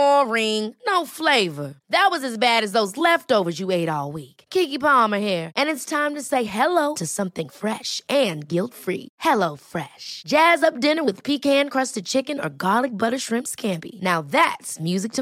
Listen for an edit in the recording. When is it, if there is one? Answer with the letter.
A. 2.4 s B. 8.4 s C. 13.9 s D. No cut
D